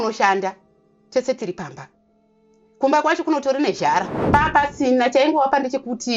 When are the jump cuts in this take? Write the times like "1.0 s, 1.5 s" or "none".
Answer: 4.2 s